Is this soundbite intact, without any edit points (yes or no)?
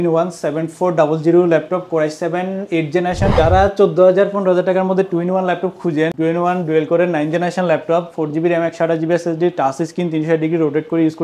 no